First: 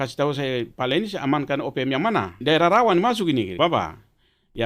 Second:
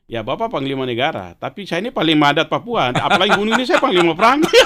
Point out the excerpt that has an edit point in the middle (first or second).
first